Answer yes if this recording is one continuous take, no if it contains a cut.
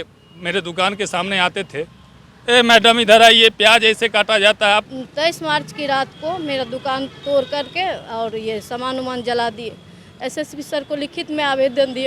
no